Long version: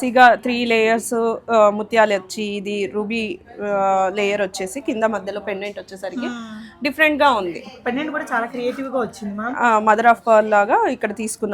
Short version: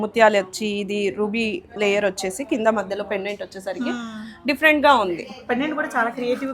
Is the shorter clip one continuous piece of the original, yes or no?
no